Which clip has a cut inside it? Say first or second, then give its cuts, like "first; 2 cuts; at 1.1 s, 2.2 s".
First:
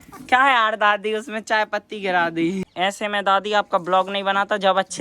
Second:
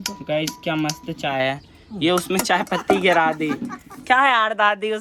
first; 1 cut; at 2.7 s